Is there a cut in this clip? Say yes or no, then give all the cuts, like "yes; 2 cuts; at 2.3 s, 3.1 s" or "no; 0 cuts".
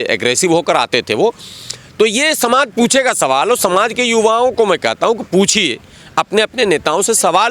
no; 0 cuts